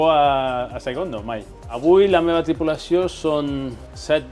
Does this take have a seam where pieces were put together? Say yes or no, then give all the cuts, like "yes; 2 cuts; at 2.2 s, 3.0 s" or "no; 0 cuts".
no; 0 cuts